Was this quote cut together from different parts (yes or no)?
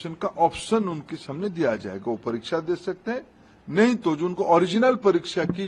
no